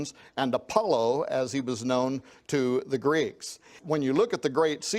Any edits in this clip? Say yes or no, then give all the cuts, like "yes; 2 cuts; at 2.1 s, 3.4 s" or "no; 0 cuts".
yes; 1 cut; at 3.8 s